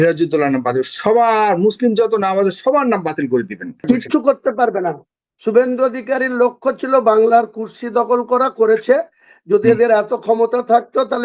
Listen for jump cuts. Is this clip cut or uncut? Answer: cut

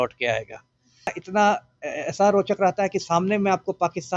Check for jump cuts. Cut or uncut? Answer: cut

